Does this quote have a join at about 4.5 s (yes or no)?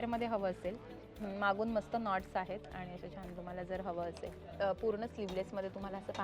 yes